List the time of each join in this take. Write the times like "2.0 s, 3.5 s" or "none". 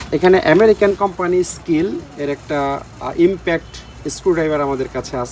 none